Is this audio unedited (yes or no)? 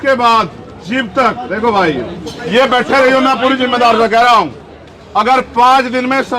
no